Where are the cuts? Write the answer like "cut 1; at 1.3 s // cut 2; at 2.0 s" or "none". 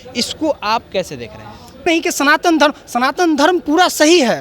cut 1; at 1.9 s